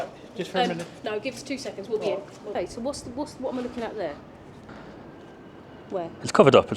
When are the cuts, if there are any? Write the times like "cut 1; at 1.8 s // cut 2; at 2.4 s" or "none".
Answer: cut 1; at 2.6 s // cut 2; at 4.7 s